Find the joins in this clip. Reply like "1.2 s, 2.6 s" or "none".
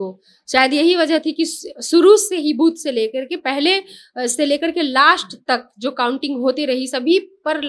none